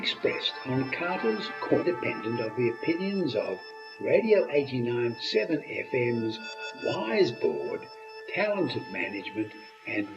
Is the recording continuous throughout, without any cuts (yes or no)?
no